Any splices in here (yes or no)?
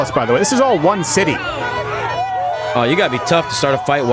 no